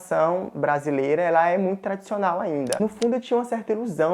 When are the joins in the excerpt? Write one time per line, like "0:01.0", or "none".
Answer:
0:02.8